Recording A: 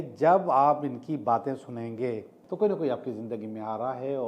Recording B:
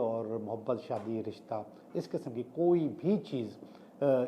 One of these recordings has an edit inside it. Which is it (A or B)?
A